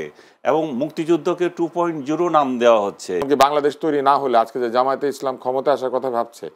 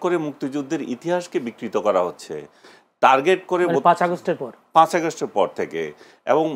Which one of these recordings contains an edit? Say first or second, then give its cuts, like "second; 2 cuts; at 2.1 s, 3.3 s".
first; 1 cut; at 3.2 s